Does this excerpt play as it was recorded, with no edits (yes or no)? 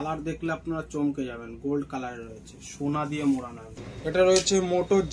no